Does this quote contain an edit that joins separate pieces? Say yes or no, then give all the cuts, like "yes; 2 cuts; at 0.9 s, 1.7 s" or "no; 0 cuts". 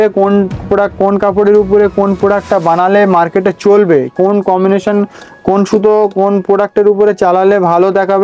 no; 0 cuts